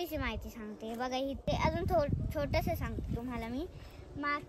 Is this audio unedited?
no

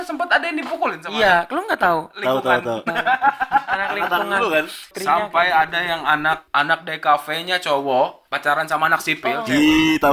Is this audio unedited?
no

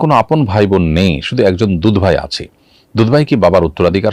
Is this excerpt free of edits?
yes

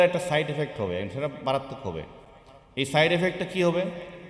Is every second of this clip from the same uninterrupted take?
yes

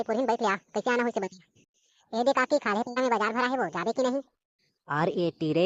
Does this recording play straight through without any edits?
yes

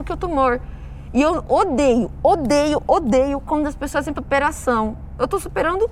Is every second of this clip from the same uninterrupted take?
no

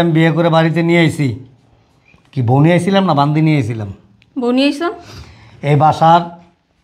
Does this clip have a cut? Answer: no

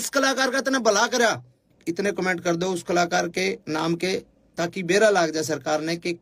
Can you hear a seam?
yes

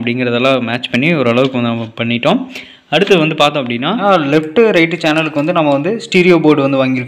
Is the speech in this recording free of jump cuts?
yes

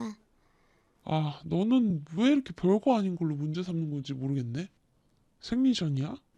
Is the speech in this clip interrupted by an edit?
no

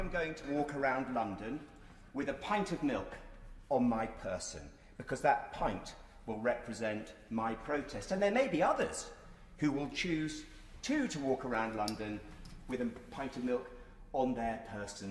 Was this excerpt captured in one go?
yes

